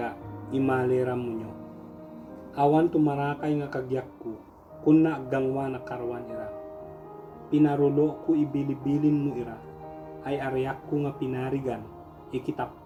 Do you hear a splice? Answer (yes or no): no